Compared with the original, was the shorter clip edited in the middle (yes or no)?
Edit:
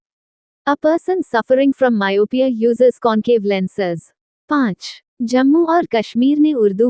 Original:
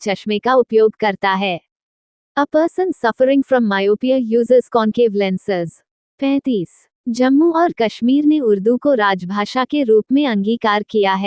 yes